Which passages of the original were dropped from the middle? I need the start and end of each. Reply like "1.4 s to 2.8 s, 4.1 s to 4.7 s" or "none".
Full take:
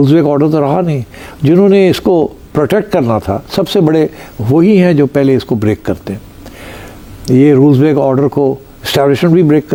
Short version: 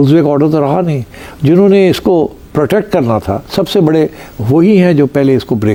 none

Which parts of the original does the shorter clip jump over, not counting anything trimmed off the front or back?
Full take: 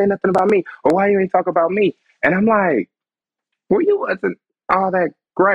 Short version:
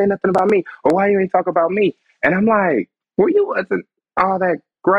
3.0 s to 3.5 s

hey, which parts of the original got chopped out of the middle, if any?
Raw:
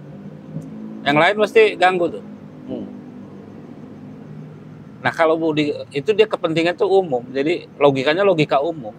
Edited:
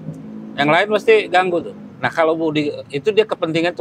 2.3 s to 4.8 s

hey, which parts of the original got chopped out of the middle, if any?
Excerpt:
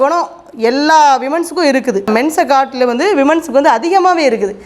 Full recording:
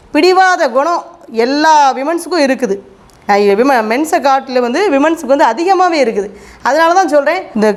2.8 s to 3.8 s

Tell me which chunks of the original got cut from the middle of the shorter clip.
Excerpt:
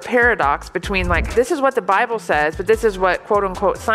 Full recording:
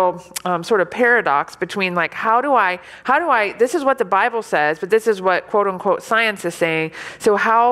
2.1 s to 3.5 s

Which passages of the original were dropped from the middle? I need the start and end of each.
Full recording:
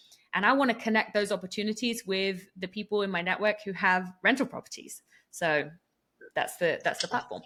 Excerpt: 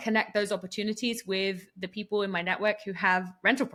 none

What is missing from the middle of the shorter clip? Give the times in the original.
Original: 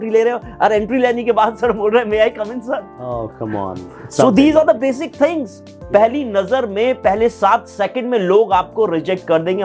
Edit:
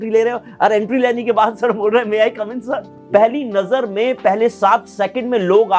2.9 s to 5.7 s

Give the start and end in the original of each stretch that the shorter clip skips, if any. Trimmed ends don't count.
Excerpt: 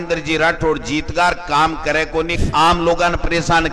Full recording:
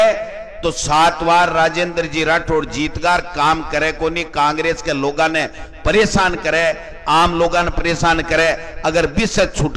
4.2 s to 6.9 s

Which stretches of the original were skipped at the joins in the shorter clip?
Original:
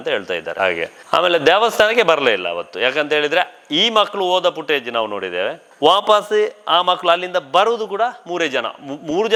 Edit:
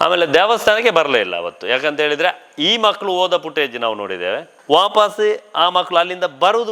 none

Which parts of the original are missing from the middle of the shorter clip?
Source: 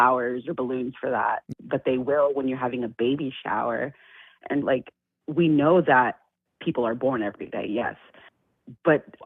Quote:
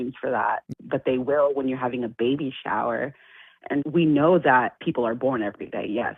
4.6 s to 5.3 s, 6.2 s to 6.6 s

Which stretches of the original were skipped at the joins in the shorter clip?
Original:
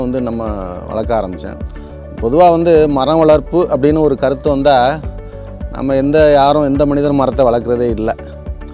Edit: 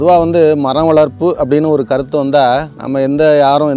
5.1 s to 5.7 s

